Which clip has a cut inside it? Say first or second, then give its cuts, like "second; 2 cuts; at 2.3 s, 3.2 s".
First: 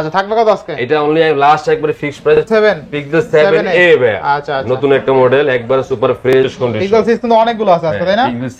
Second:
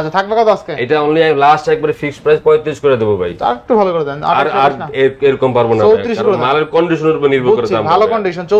first; 2 cuts; at 2.4 s, 6.5 s